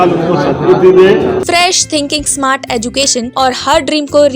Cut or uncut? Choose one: cut